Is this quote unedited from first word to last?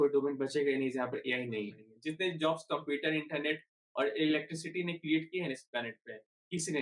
no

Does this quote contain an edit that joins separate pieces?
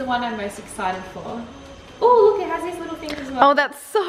no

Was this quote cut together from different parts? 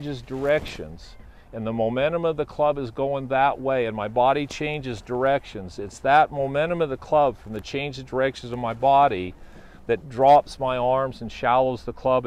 no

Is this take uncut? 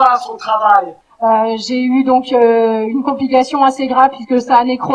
no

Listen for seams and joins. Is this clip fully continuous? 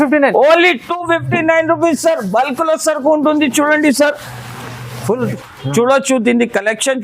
no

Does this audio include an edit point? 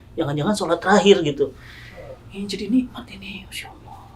no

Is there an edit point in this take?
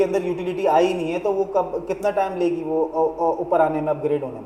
no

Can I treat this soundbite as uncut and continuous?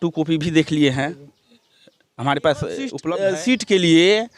no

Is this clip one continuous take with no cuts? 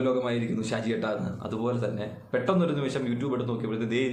yes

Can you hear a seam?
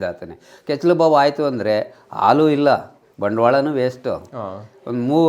no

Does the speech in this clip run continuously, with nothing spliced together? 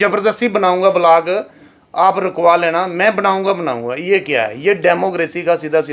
yes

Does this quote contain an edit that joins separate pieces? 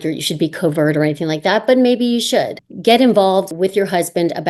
yes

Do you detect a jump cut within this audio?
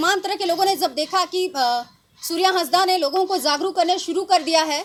no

